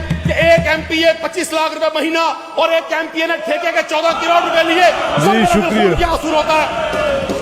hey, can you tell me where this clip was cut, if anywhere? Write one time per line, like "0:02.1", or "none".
none